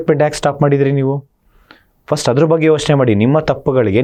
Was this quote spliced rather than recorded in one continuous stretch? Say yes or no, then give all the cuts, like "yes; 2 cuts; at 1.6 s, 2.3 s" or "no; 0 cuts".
no; 0 cuts